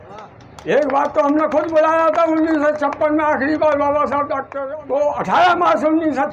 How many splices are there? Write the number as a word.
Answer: one